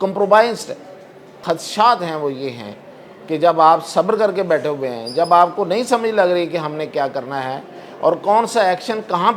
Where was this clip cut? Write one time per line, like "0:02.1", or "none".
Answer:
0:01.4